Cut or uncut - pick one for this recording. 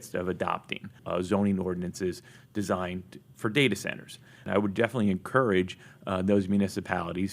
cut